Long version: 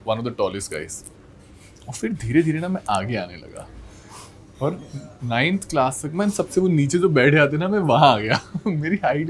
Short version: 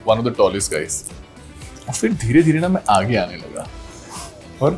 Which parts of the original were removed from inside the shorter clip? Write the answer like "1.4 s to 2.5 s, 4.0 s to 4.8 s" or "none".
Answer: none